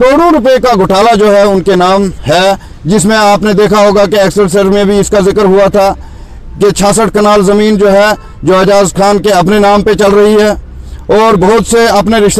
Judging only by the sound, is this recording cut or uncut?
uncut